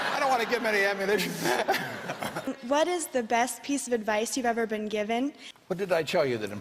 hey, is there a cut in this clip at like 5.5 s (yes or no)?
yes